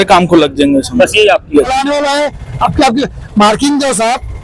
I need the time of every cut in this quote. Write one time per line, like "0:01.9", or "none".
0:01.7